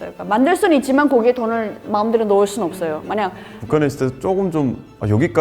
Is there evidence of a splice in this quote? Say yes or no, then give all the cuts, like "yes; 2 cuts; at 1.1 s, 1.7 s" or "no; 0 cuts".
yes; 1 cut; at 3.5 s